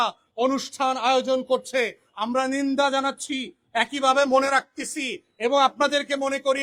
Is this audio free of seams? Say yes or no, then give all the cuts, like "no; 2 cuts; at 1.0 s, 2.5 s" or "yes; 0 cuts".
yes; 0 cuts